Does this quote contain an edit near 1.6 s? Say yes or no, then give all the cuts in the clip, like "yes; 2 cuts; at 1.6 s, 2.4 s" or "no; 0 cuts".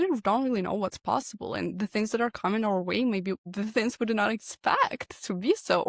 no; 0 cuts